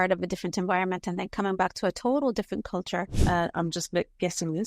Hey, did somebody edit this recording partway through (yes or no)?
yes